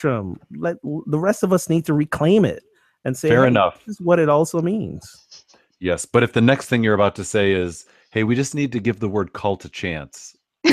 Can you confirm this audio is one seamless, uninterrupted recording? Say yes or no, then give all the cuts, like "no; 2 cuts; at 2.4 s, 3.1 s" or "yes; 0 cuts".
yes; 0 cuts